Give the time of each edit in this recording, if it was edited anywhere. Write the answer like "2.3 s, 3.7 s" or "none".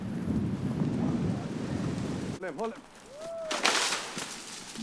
2.4 s